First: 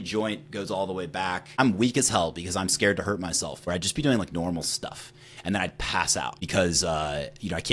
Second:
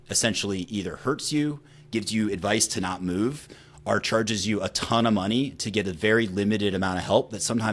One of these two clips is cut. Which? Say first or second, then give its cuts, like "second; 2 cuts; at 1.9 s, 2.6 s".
first; 3 cuts; at 1.6 s, 3.6 s, 6.4 s